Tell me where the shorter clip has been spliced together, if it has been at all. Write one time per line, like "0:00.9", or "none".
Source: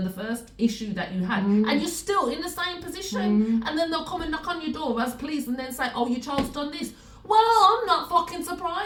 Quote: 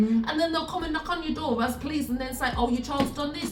none